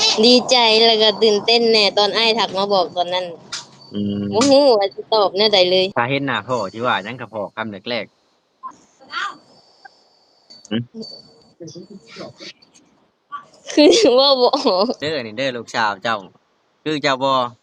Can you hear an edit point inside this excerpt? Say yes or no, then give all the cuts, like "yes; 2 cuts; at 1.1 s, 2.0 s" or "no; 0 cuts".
yes; 2 cuts; at 5.9 s, 15.0 s